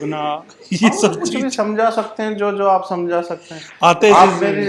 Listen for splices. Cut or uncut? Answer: uncut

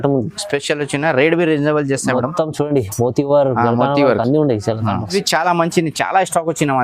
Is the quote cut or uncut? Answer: cut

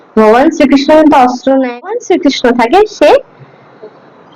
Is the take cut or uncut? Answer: cut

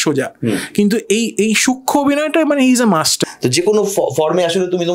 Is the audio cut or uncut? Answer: cut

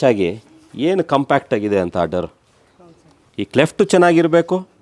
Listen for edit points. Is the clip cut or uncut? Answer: uncut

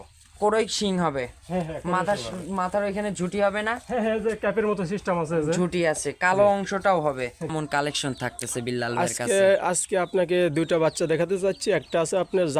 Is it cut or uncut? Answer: cut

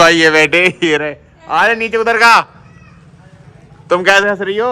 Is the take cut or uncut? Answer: uncut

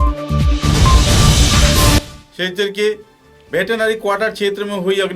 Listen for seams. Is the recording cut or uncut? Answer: cut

